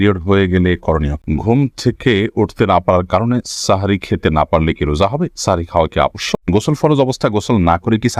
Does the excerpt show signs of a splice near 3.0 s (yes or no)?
no